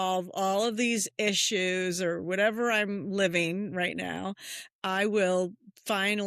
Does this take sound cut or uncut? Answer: uncut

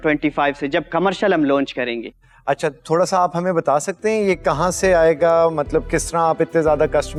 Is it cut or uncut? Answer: uncut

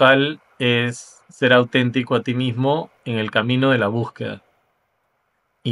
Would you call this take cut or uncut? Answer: uncut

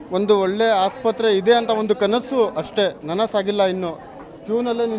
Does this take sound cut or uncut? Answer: cut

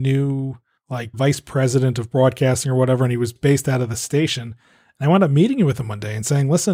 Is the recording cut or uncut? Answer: uncut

